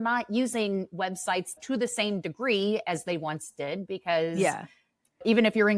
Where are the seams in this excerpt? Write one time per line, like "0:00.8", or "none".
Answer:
0:01.5